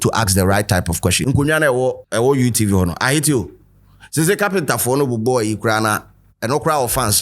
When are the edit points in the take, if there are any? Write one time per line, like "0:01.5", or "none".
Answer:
0:01.2
0:02.0